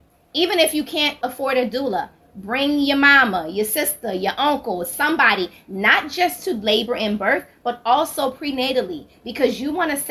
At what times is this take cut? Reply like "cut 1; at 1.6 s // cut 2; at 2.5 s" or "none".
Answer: cut 1; at 1.2 s